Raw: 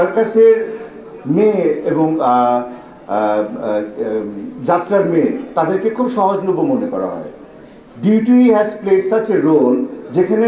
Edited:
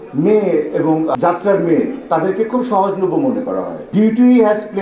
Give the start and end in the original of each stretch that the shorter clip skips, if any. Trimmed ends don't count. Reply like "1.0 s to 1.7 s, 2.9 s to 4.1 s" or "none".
2.3 s to 4.6 s, 7.2 s to 7.9 s